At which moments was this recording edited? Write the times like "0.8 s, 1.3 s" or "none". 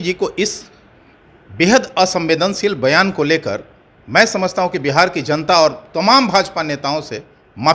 none